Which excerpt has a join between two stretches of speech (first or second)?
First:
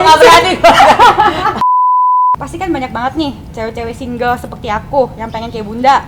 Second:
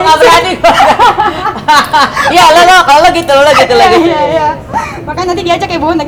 first